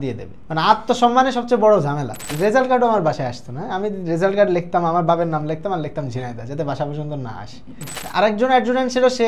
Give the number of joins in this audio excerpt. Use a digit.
2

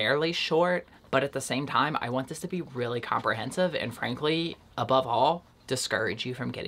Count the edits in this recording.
0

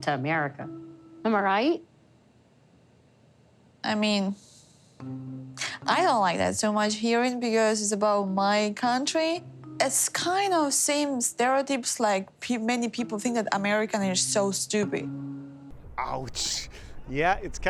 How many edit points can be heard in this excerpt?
0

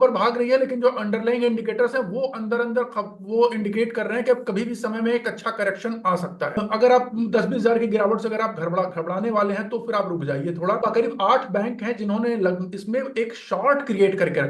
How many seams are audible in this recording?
2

